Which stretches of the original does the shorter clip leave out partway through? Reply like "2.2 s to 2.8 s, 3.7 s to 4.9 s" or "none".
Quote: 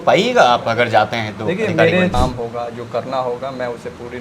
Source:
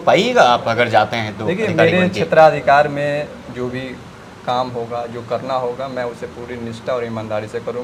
2.1 s to 4.5 s